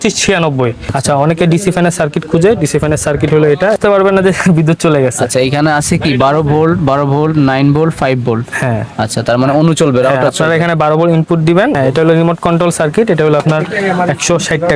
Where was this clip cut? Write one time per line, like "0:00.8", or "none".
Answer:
0:00.9
0:03.8
0:11.8